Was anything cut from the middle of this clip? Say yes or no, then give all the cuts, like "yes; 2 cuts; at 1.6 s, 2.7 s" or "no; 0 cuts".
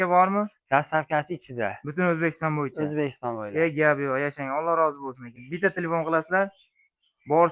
yes; 1 cut; at 5.3 s